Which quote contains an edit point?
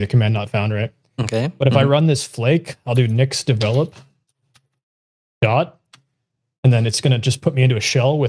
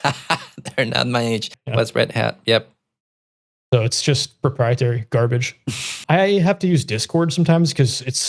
second; 2 cuts; at 1.6 s, 6.0 s

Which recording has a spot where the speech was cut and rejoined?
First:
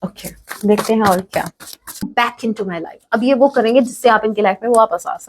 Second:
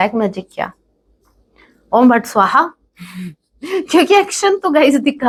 first; 1 cut; at 2.0 s

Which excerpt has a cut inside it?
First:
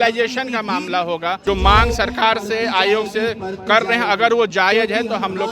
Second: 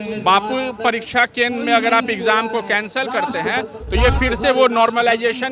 first; 1 cut; at 1.4 s

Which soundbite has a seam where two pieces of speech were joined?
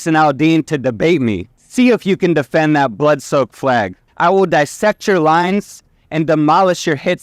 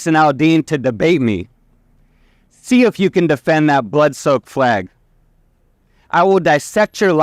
first; 2 cuts; at 1.5 s, 4.0 s

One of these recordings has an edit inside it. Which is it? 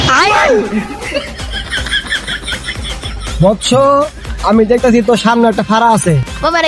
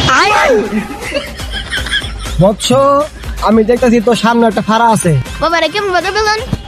second; 1 cut; at 2.0 s

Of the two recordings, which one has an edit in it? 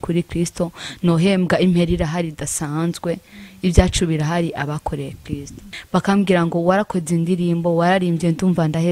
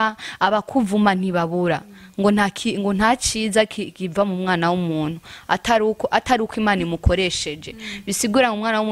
first; 1 cut; at 5.6 s

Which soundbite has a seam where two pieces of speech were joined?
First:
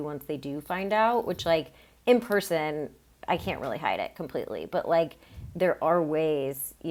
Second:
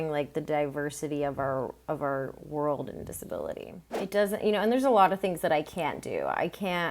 second; 1 cut; at 3.8 s

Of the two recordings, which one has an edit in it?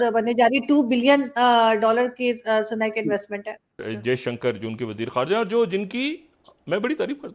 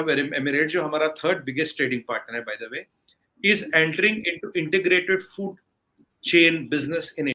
first; 1 cut; at 3.8 s

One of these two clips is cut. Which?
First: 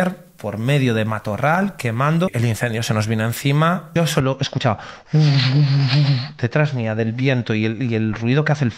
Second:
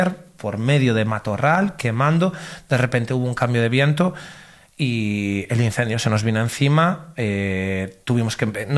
first; 2 cuts; at 2.3 s, 3.9 s

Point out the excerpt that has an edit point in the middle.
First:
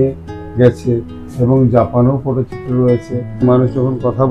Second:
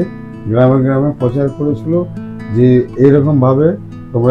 first; 1 cut; at 3.3 s

